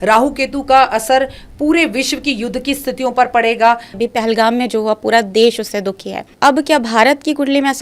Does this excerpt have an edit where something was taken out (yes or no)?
yes